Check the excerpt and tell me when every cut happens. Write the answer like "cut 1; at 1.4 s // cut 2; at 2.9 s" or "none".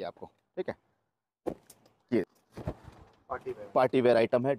cut 1; at 2.2 s